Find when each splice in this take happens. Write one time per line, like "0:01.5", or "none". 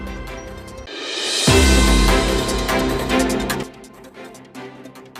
0:03.5